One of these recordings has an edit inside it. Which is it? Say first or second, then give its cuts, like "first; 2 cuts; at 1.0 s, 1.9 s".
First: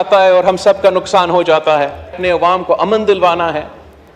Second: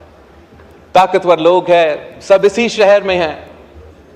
first; 1 cut; at 2.2 s